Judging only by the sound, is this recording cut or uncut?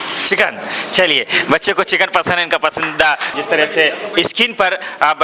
cut